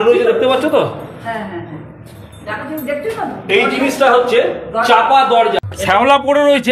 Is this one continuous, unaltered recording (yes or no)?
no